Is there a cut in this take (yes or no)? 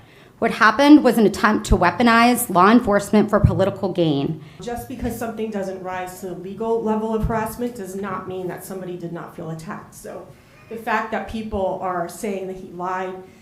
yes